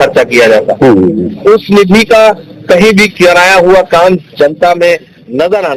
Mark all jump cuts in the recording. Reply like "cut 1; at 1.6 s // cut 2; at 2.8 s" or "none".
none

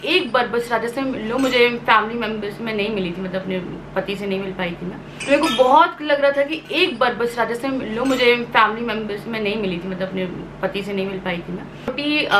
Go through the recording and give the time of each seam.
none

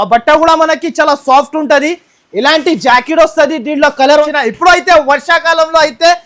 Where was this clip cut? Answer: cut 1; at 4.2 s

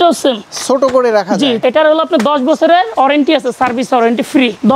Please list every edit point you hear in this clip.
cut 1; at 1.6 s

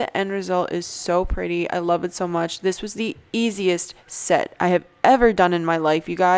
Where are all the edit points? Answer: none

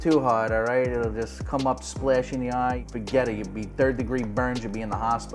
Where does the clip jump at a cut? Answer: cut 1; at 2.8 s

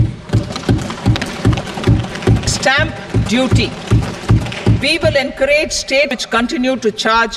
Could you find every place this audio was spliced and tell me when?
cut 1; at 2.5 s // cut 2; at 6.2 s

